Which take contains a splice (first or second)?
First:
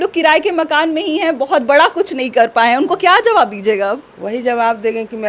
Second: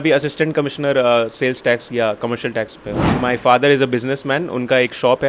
second